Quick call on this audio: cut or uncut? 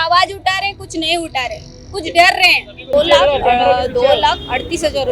uncut